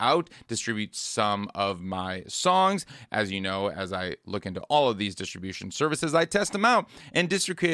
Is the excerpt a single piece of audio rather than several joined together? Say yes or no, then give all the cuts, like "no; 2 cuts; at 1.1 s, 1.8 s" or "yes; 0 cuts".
yes; 0 cuts